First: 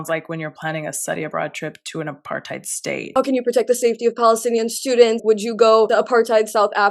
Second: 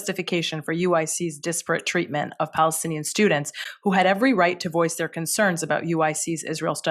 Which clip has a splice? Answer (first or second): first